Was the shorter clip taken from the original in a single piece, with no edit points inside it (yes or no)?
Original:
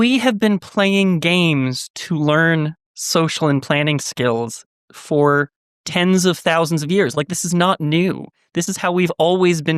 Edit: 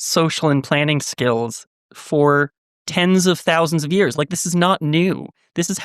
yes